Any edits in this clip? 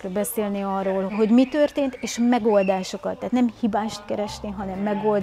yes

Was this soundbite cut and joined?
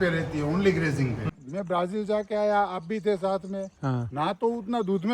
yes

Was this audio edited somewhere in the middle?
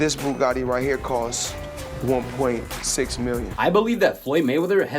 yes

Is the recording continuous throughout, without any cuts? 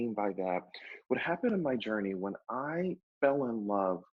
no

